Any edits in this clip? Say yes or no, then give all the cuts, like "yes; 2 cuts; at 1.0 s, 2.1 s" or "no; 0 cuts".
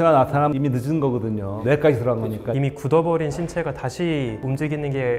yes; 1 cut; at 2.5 s